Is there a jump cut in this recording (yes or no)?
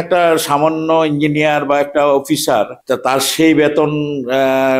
yes